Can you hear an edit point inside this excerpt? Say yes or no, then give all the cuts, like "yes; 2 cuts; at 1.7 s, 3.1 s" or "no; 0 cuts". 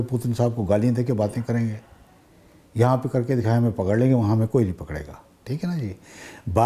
no; 0 cuts